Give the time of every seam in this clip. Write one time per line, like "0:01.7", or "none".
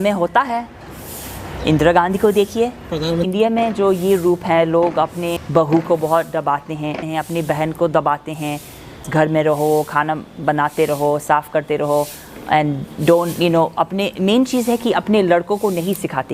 0:03.3
0:05.4
0:07.0
0:09.1